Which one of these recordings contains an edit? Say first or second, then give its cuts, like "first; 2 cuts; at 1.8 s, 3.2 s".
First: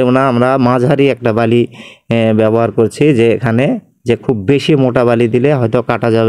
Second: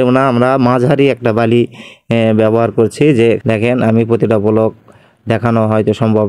second; 1 cut; at 3.4 s